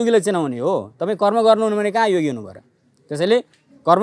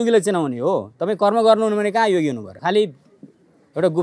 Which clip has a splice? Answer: second; 1 cut; at 2.5 s

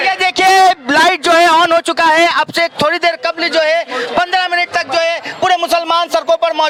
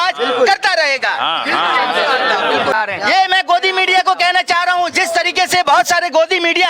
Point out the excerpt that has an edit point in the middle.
second; 1 cut; at 2.8 s

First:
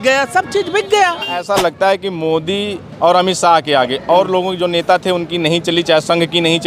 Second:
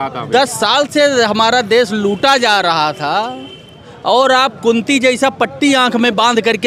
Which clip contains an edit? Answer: first; 1 cut; at 1.4 s

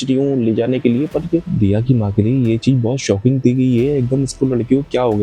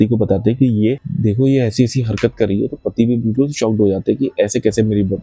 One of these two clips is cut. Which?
first; 1 cut; at 1.5 s

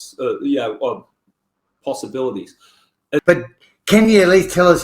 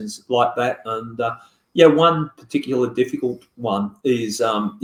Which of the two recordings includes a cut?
first; 1 cut; at 3.2 s

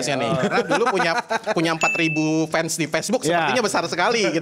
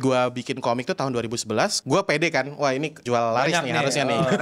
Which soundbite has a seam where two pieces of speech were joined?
second; 2 cuts; at 1.8 s, 3.0 s

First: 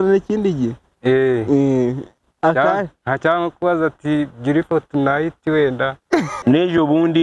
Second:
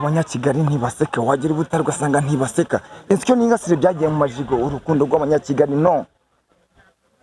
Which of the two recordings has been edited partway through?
first; 1 cut; at 6.3 s

